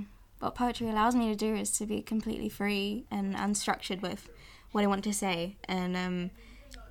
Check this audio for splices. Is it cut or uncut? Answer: cut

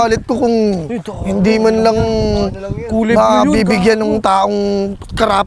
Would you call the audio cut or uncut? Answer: uncut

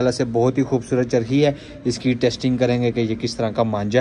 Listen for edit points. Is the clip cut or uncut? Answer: uncut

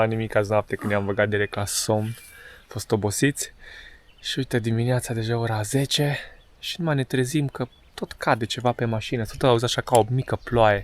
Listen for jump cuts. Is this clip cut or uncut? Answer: uncut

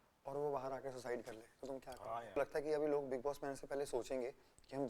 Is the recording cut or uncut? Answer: cut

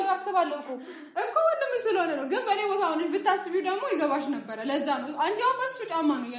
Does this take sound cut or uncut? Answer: uncut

